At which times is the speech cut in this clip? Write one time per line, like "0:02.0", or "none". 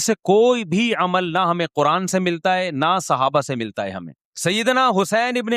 0:04.2